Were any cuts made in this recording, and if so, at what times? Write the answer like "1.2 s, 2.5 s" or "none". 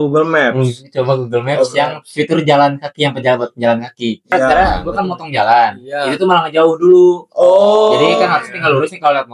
4.5 s